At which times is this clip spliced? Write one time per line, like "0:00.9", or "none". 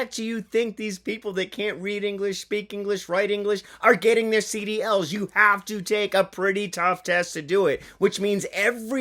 none